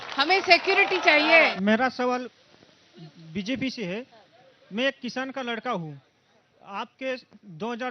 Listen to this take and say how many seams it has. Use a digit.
1